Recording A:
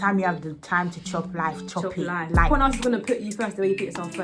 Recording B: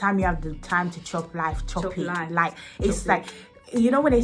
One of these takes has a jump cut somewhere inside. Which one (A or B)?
A